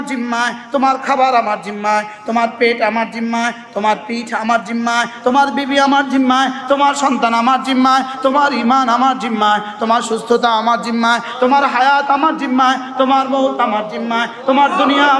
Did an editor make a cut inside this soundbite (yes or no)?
no